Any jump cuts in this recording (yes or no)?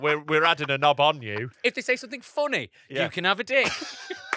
yes